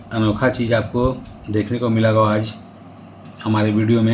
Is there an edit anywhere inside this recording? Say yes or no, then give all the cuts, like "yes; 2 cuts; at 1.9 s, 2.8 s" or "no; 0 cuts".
no; 0 cuts